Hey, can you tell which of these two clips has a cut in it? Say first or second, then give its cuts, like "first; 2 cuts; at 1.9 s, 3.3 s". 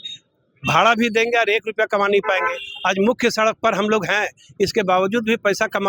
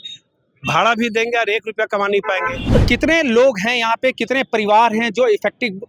second; 1 cut; at 2.6 s